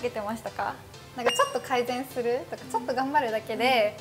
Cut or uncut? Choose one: cut